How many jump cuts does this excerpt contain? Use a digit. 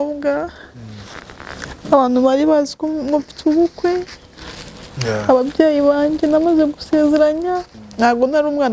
1